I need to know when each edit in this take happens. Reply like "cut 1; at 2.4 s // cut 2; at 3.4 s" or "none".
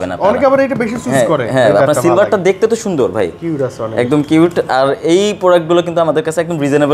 none